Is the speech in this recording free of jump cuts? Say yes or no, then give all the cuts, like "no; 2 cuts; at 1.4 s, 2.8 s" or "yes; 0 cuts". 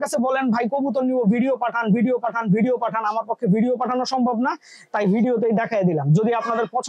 yes; 0 cuts